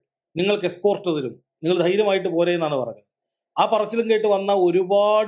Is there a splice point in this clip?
no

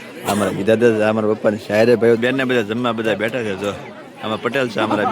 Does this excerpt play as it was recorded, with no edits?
no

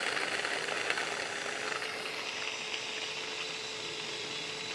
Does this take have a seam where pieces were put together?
no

